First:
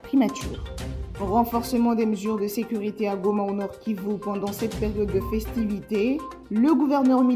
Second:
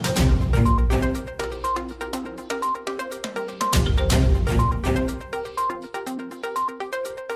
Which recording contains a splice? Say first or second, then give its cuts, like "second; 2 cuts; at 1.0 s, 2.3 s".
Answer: second; 1 cut; at 6.4 s